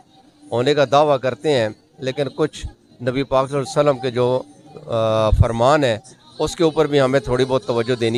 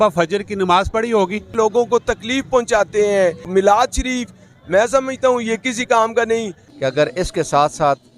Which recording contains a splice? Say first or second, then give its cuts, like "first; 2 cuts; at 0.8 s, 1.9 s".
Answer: second; 3 cuts; at 1.5 s, 3.5 s, 6.6 s